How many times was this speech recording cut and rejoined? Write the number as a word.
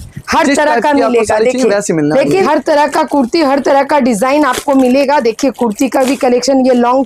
one